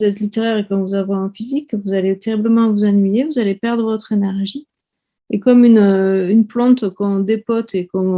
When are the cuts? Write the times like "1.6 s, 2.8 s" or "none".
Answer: none

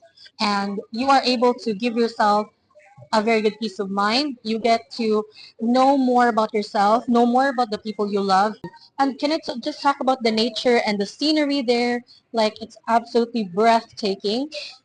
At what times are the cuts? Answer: 8.7 s

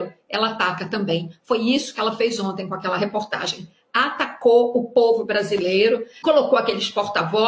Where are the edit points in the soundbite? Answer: 6.1 s

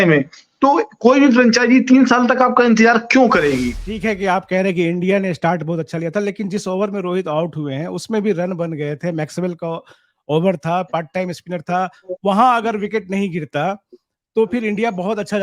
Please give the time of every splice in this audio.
3.9 s

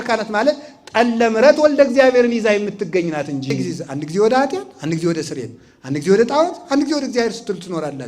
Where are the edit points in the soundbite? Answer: 3.7 s

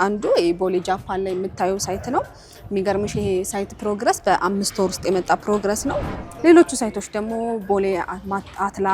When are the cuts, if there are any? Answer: 6.1 s

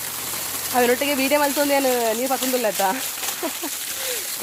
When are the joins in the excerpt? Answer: none

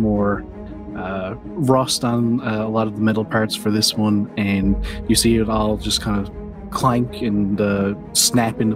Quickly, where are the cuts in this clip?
none

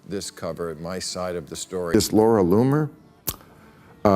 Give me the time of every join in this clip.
1.9 s

